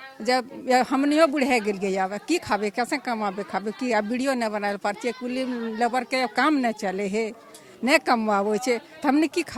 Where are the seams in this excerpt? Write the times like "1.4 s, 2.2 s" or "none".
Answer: none